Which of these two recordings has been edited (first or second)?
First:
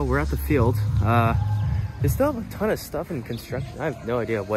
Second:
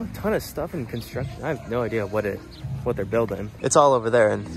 second